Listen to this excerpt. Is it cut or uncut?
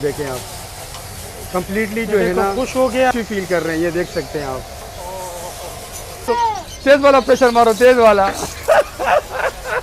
cut